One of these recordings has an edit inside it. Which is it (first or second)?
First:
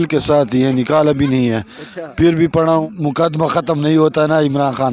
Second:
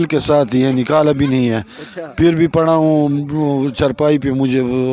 first